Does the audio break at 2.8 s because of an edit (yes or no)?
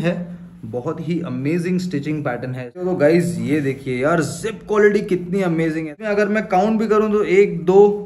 yes